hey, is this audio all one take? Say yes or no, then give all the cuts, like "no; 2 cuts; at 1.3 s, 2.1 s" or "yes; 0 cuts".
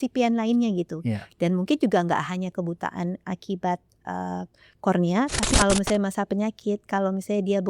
no; 1 cut; at 5.5 s